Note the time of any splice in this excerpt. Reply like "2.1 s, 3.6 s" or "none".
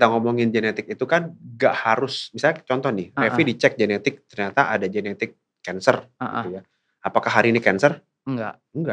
none